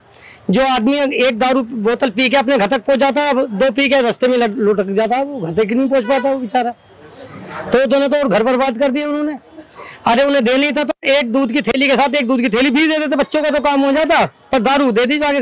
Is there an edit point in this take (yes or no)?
no